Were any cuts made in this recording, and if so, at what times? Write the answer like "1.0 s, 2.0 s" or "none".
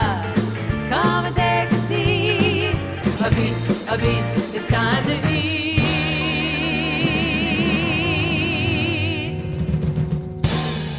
none